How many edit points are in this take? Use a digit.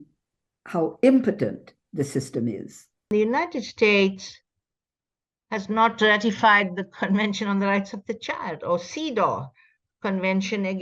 1